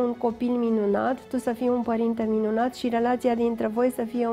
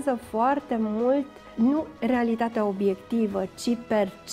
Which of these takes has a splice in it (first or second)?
second